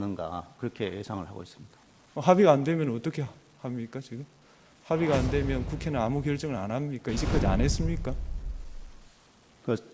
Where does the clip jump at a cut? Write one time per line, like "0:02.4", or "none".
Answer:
none